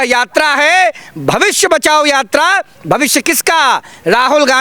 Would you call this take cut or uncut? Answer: uncut